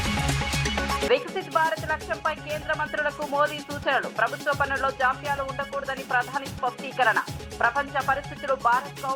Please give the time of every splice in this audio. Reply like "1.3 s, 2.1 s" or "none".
1.1 s